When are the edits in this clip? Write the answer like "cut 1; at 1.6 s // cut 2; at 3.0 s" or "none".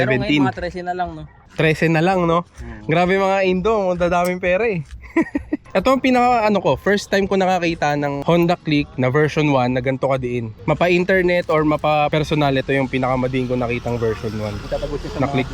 cut 1; at 5.6 s